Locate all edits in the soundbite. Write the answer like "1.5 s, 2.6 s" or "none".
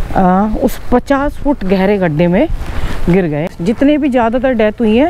3.4 s